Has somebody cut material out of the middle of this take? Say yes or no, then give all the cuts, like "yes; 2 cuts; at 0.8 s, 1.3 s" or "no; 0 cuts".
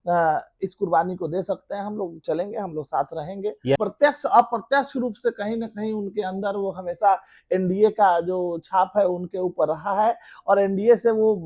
yes; 1 cut; at 3.8 s